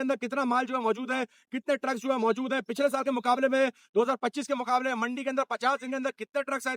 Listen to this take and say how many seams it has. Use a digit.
0